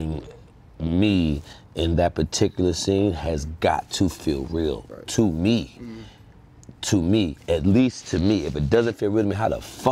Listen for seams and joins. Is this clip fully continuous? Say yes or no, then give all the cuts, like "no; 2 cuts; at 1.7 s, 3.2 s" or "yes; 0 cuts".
yes; 0 cuts